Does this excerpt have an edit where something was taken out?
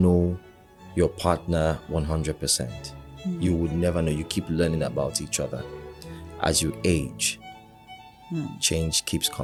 no; 0 cuts

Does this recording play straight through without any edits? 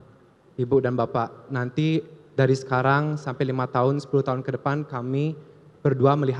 yes; 0 cuts

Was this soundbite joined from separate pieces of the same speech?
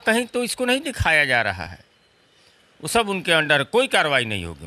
no; 0 cuts

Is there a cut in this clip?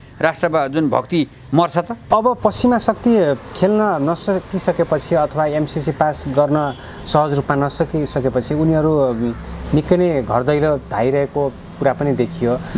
yes; 1 cut; at 2.0 s

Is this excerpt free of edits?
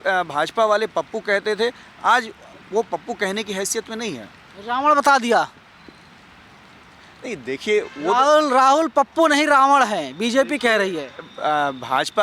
yes; 0 cuts

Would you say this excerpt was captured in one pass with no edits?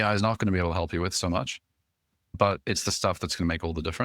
yes; 0 cuts

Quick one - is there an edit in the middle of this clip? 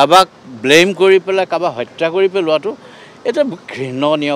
no; 0 cuts

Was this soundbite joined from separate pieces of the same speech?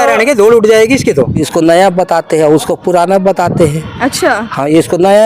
yes; 1 cut; at 1.4 s

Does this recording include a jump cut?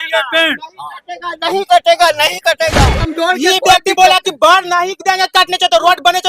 yes; 1 cut; at 2.9 s

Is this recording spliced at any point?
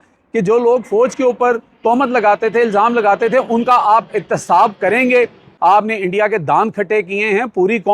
yes; 1 cut; at 5.4 s

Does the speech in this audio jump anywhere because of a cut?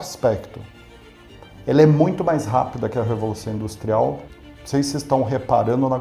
yes; 1 cut; at 4.3 s

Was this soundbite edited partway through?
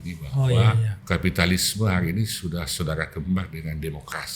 yes; 1 cut; at 0.9 s

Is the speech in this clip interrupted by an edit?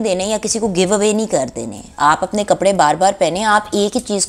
no; 0 cuts

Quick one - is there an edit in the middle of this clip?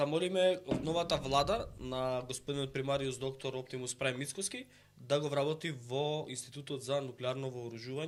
no; 0 cuts

